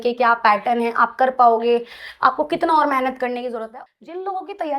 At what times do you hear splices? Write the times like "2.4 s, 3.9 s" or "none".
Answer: 3.6 s